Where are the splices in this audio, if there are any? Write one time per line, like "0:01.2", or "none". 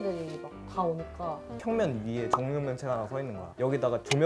0:01.6